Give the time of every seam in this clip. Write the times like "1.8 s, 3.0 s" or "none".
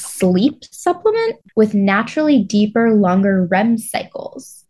1.4 s